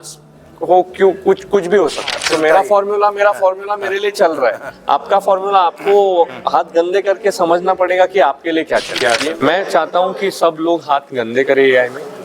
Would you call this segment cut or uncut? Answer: cut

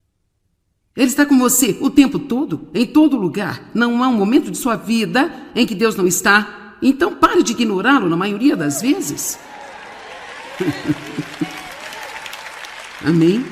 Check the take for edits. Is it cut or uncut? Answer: cut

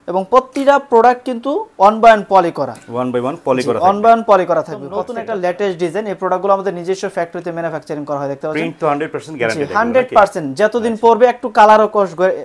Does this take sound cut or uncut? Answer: cut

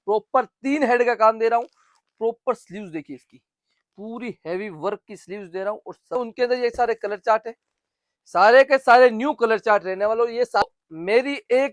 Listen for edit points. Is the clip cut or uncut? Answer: cut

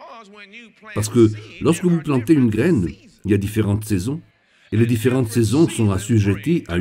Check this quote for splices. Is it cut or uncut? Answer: cut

